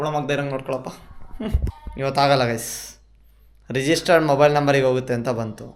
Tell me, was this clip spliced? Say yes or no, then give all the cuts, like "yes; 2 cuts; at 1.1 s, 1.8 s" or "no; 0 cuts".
yes; 1 cut; at 1.8 s